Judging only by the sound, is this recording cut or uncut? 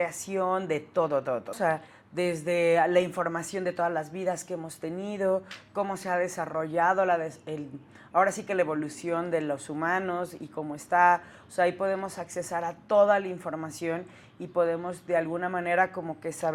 cut